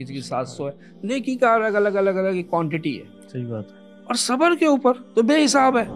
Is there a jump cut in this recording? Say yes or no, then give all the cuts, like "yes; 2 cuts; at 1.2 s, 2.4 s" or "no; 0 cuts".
yes; 1 cut; at 5.0 s